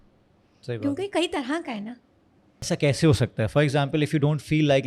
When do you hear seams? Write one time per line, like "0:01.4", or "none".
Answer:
0:02.6